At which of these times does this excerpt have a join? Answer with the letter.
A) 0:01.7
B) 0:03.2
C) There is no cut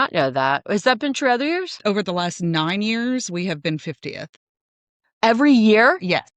A